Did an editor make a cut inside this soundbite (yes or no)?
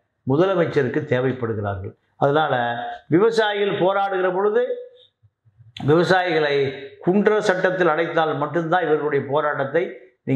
no